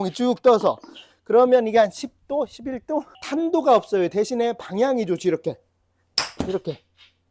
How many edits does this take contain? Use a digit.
1